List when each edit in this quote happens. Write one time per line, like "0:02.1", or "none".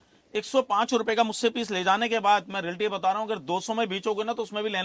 none